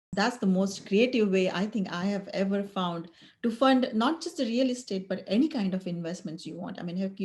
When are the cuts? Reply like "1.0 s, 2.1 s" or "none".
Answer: none